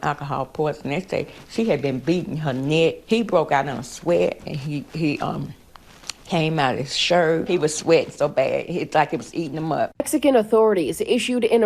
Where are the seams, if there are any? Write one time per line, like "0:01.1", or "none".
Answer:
0:10.0